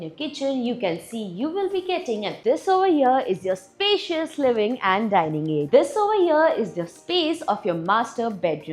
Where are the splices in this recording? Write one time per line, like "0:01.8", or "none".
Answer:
0:02.3
0:05.7